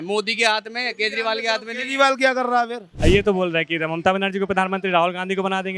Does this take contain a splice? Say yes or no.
yes